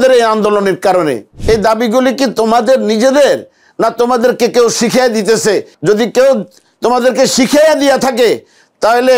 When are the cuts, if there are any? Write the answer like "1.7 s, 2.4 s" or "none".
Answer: 1.3 s, 5.7 s